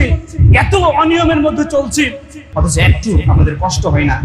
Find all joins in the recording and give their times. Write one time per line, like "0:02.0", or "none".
0:02.4